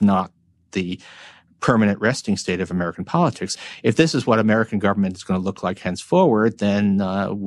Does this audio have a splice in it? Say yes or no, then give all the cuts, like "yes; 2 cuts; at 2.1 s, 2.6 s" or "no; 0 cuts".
yes; 1 cut; at 3.5 s